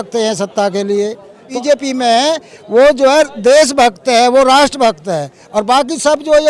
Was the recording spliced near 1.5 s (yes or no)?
yes